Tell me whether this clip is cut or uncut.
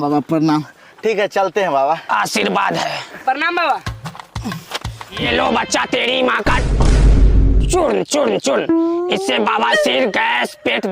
cut